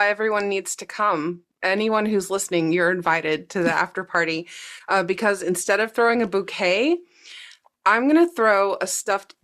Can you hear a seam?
yes; 1 cut; at 1.5 s

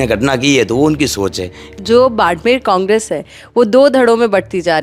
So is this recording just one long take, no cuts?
no; 1 cut; at 1.7 s

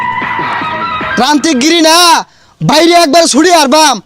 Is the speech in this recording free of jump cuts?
no; 1 cut; at 1.1 s

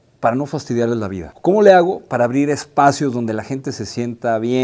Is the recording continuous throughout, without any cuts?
no; 1 cut; at 1.2 s

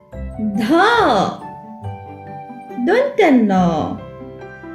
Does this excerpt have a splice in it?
yes; 2 cuts; at 1.4 s, 2.8 s

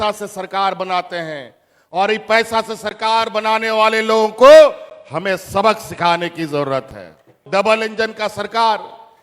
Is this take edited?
yes; 1 cut; at 7.4 s

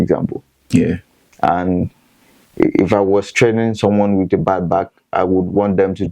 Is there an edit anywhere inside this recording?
no; 0 cuts

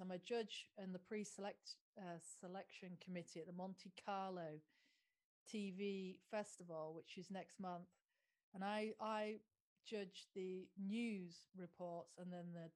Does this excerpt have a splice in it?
no; 0 cuts

